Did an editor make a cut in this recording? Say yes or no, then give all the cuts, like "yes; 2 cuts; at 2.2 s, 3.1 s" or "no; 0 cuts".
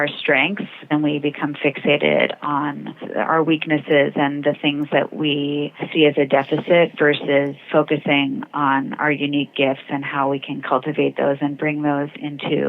yes; 3 cuts; at 0.8 s, 5.8 s, 7.6 s